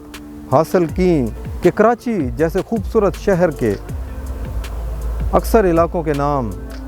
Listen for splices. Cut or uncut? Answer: cut